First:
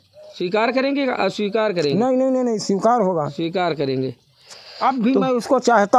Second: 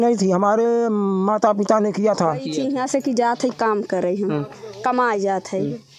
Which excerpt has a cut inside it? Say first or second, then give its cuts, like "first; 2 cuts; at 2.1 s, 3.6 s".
second; 1 cut; at 2.5 s